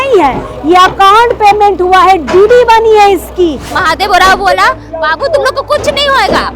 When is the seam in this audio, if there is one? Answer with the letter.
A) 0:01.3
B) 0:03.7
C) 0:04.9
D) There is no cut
B